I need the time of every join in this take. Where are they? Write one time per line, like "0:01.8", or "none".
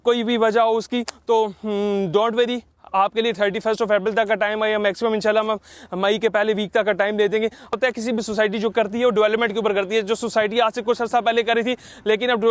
0:07.7